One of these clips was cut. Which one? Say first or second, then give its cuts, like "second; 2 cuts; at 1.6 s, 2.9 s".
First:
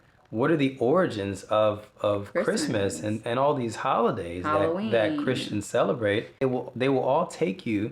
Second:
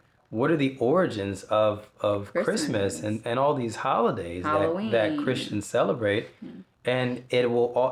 first; 1 cut; at 6.4 s